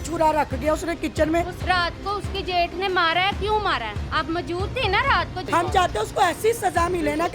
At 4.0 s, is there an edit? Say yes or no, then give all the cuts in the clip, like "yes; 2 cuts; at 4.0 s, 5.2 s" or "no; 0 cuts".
no; 2 cuts; at 1.6 s, 5.4 s